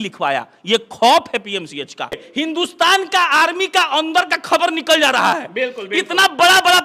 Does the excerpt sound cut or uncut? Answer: cut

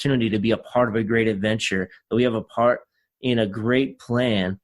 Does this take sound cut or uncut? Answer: uncut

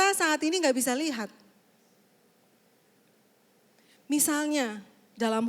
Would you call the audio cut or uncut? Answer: uncut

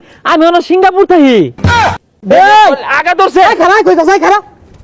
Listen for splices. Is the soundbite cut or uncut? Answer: cut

